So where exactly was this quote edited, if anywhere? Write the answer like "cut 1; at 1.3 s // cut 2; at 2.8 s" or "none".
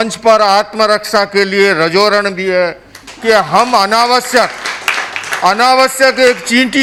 none